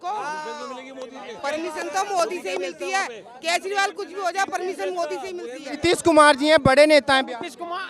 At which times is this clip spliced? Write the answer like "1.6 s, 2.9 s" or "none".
5.8 s